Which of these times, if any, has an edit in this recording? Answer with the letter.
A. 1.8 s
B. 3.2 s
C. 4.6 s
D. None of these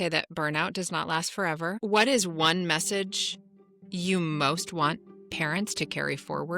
A